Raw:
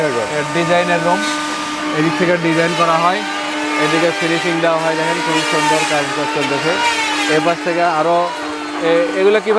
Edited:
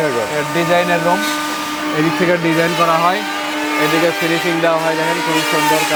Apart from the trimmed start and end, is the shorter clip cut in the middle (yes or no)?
no